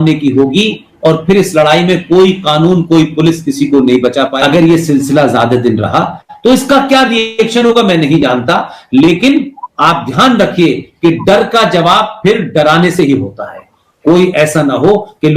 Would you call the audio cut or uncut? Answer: cut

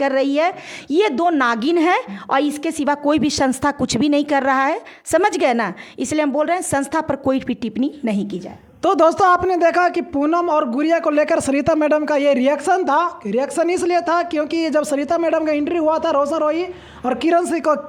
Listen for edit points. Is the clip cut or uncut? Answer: uncut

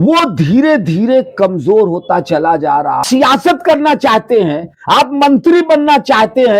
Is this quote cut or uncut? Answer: cut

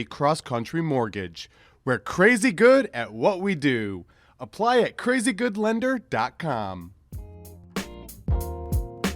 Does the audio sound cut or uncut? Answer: cut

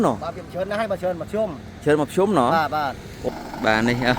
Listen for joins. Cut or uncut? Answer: cut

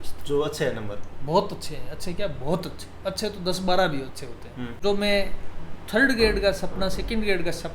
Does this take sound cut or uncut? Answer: cut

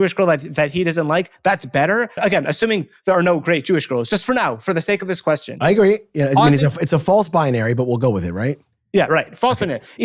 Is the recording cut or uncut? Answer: cut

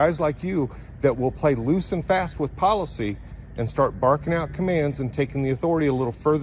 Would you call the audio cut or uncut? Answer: uncut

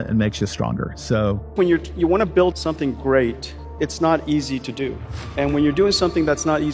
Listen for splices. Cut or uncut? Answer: cut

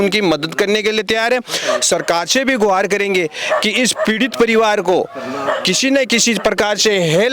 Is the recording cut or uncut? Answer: uncut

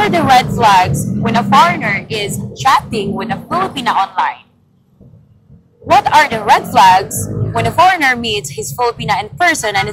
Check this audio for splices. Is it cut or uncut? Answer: uncut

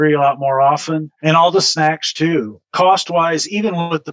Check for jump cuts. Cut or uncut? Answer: cut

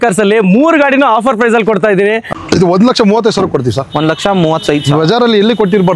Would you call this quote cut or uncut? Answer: cut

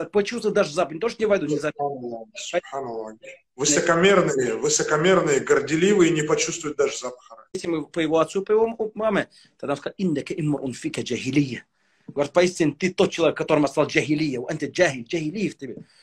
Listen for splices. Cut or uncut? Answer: cut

